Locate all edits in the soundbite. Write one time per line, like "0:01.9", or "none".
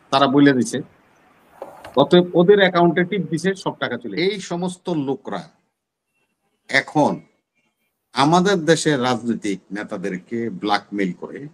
0:04.1